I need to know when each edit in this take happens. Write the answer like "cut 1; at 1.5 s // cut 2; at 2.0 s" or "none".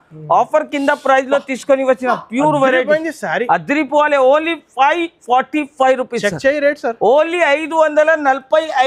none